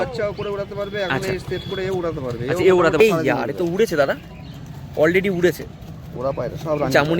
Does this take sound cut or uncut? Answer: cut